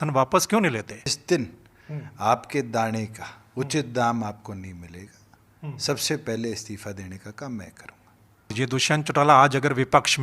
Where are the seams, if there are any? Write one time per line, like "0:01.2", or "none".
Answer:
0:01.1
0:08.5